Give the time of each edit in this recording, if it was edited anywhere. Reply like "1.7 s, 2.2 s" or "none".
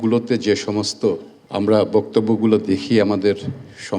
1.3 s